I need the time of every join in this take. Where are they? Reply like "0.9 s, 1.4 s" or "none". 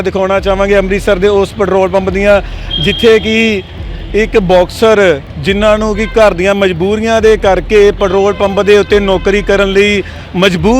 none